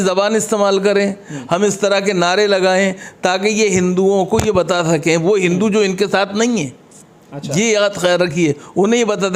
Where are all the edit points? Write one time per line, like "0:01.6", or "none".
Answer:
none

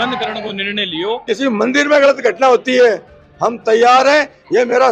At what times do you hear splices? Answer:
0:01.2

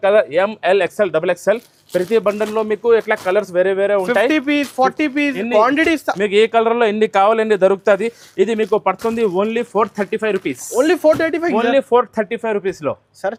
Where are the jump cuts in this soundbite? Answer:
none

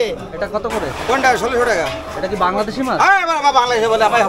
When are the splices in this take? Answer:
none

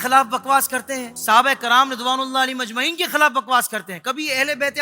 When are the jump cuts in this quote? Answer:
0:01.1

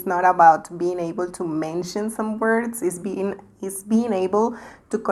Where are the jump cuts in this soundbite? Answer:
none

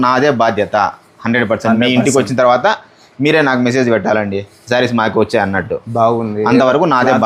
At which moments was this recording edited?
none

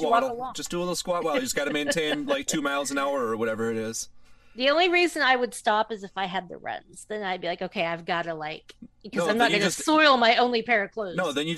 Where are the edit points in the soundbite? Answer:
none

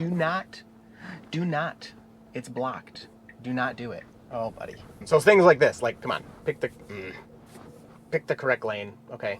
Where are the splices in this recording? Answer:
0:05.0

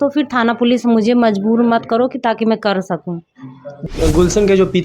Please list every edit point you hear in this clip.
0:03.9

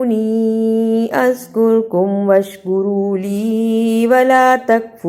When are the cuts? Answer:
none

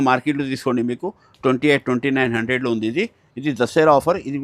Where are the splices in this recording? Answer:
none

